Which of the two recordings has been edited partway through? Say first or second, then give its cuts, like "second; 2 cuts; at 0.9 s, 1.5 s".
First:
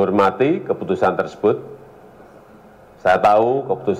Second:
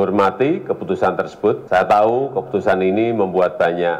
second; 1 cut; at 1.6 s